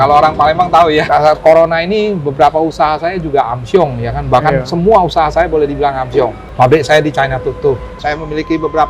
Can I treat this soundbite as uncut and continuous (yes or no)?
no